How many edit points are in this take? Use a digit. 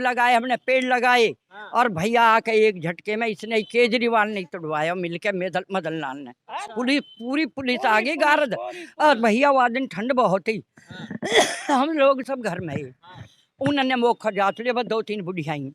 0